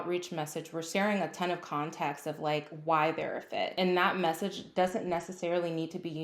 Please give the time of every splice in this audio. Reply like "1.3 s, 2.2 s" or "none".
0.8 s, 3.7 s